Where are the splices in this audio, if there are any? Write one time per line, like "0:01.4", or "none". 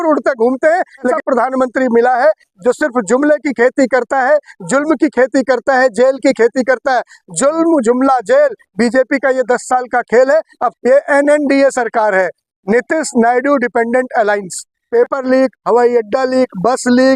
0:01.1
0:10.7
0:14.8

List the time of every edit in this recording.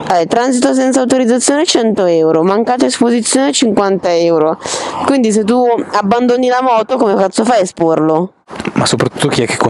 0:08.4

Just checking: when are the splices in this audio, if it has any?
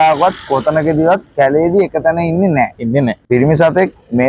none

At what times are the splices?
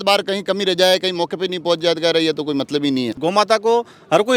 0:03.1

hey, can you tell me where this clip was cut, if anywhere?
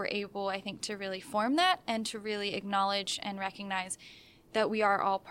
none

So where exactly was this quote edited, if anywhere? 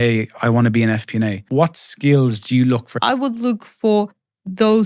0:01.4
0:03.1

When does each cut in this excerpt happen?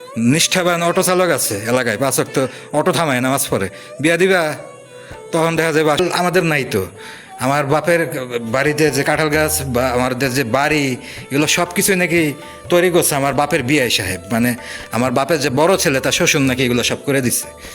0:06.0

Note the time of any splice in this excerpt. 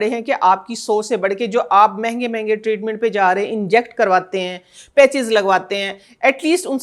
none

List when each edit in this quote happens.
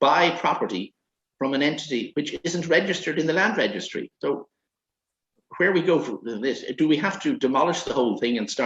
none

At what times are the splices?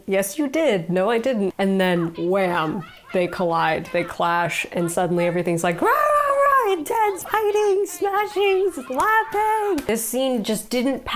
0:01.5
0:09.8

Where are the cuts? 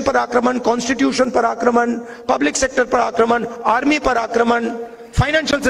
none

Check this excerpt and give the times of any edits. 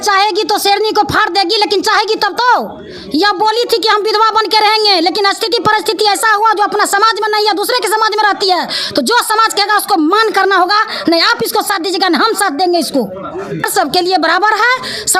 0:13.7

